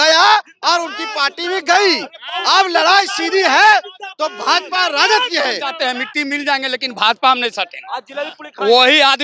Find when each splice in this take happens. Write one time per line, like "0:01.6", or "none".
0:05.7